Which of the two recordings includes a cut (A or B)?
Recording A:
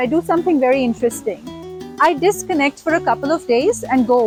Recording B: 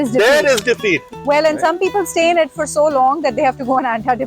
B